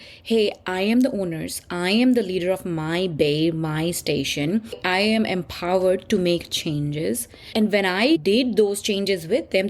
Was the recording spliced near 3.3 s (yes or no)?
no